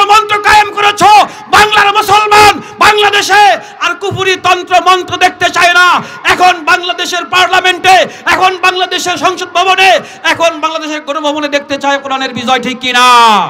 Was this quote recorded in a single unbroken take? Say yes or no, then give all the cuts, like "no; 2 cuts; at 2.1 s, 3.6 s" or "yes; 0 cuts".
yes; 0 cuts